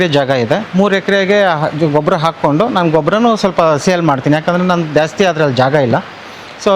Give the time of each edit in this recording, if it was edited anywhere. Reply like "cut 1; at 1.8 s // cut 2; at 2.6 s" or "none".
none